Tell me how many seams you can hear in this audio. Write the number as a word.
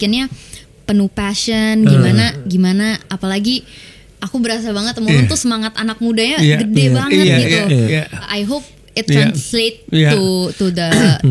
one